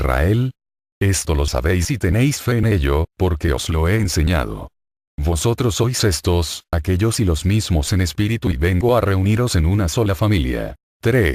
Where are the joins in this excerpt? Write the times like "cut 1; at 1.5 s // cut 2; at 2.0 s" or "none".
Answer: cut 1; at 8.1 s